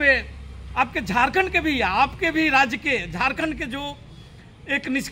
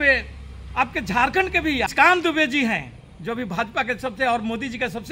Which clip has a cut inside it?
second; 1 cut; at 1.9 s

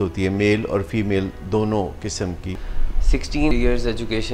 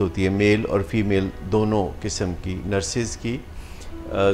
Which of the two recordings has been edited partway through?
first; 1 cut; at 2.5 s

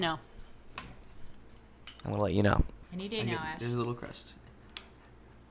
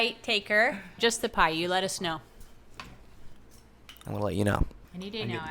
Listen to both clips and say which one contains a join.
second; 1 cut; at 1.0 s

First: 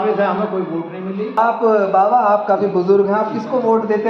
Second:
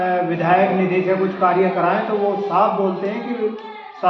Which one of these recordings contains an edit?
first; 1 cut; at 1.4 s

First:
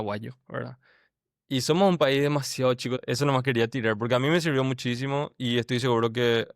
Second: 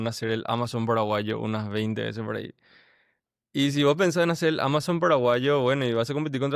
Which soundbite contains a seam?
first; 1 cut; at 3.0 s

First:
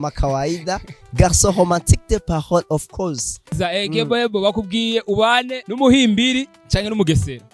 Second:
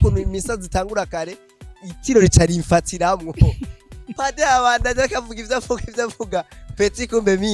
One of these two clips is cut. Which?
first; 3 cuts; at 3.5 s, 5.6 s, 6.6 s

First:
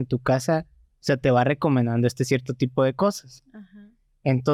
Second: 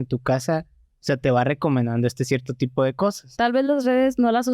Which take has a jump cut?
second; 1 cut; at 3.3 s

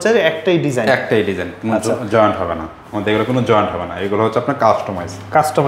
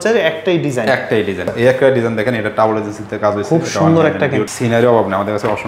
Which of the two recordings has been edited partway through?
second; 2 cuts; at 1.5 s, 4.5 s

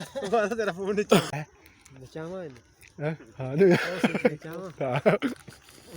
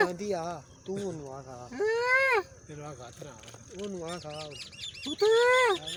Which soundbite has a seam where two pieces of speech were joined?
first; 1 cut; at 1.3 s

